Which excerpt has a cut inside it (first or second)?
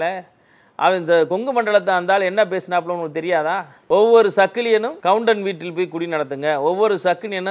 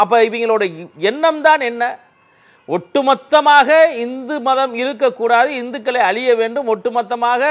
first